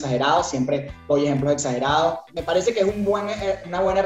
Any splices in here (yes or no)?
yes